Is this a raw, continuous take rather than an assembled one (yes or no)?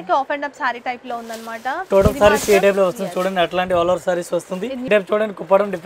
no